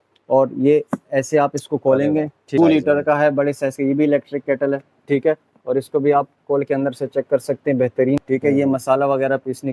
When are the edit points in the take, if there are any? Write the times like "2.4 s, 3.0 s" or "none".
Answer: 2.6 s, 8.2 s